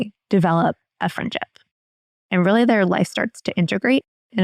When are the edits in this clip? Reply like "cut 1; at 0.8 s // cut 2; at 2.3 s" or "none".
cut 1; at 2.0 s